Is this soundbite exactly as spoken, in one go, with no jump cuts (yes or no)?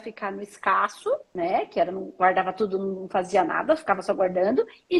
no